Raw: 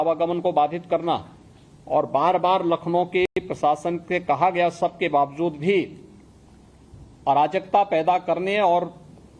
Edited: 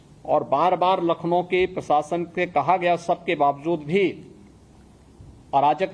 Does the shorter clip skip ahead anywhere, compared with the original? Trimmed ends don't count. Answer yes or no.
yes